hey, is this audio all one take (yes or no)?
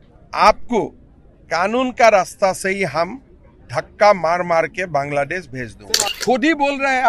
no